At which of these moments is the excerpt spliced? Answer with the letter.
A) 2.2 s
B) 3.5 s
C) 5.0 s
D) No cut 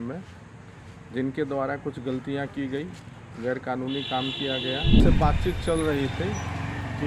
C